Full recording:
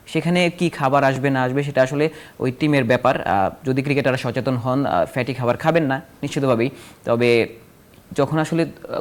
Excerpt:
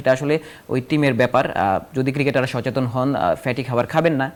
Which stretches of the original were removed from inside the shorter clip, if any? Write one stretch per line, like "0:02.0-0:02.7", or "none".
none